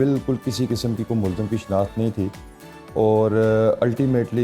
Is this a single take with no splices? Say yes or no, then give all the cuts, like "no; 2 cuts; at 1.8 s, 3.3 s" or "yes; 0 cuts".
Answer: yes; 0 cuts